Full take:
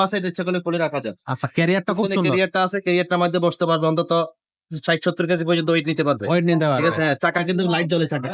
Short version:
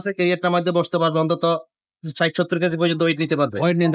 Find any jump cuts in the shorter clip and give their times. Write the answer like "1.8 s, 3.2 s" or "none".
none